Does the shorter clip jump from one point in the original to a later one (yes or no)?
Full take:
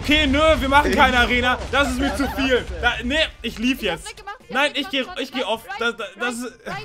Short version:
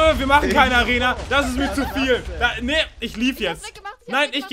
no